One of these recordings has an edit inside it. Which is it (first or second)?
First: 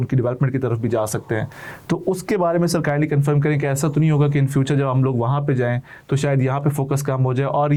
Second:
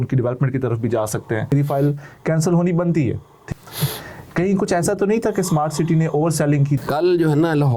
second